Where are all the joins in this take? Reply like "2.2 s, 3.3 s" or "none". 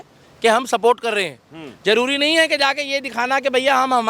none